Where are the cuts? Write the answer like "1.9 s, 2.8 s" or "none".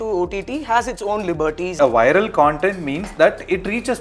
1.7 s